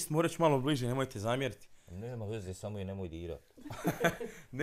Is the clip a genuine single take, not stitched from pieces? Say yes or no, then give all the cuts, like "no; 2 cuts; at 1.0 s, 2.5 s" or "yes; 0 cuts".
yes; 0 cuts